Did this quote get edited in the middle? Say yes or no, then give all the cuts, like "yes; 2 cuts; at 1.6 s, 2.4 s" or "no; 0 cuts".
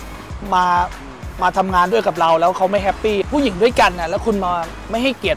yes; 1 cut; at 3.3 s